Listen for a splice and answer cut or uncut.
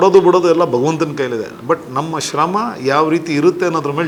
uncut